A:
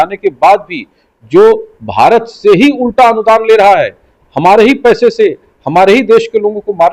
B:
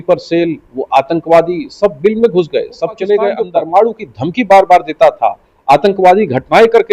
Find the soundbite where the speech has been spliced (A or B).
B